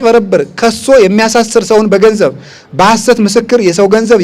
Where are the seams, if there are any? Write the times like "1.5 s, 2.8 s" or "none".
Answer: none